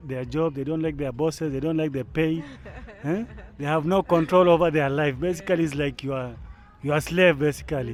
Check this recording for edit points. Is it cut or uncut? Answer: uncut